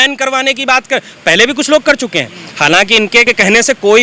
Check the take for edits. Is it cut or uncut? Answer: uncut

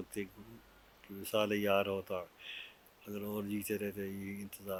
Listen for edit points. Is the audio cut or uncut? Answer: uncut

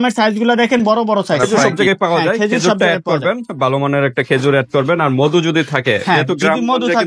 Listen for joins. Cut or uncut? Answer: cut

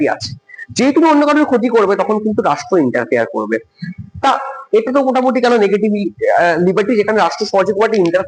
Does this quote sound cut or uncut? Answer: uncut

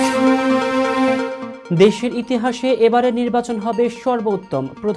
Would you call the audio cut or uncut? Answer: uncut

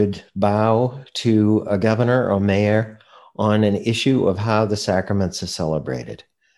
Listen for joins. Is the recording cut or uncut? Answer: uncut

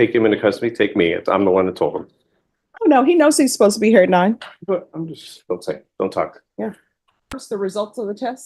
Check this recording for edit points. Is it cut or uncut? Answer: cut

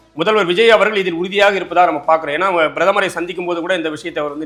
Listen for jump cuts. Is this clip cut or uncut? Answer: uncut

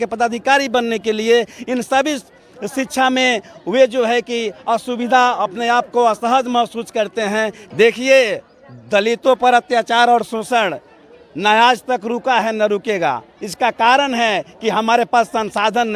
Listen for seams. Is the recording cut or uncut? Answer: cut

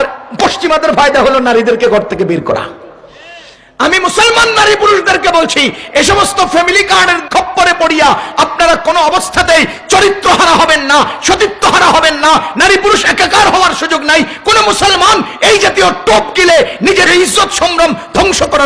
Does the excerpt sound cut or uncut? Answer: cut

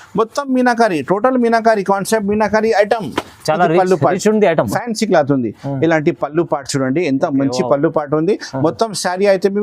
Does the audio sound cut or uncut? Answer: cut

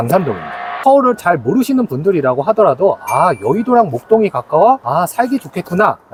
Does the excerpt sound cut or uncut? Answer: uncut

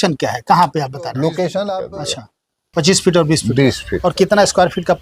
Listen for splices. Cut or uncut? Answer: cut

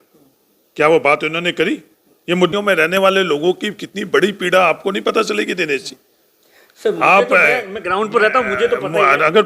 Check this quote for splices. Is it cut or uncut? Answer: cut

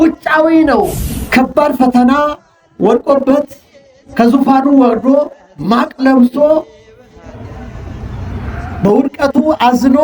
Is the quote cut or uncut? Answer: cut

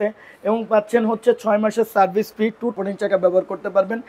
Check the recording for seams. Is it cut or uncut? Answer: cut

